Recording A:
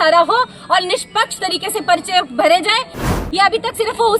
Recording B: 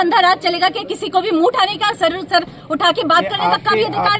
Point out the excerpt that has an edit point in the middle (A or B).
A